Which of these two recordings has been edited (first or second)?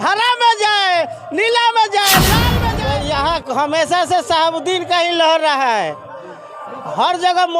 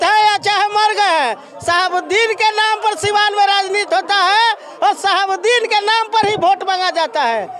first